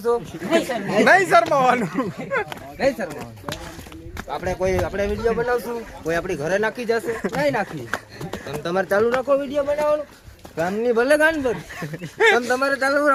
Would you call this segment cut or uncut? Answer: uncut